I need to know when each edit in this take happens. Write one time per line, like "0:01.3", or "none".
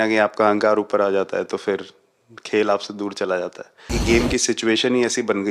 0:04.0